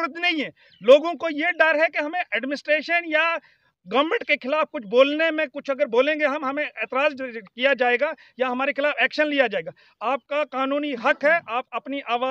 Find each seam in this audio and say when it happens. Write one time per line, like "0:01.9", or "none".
none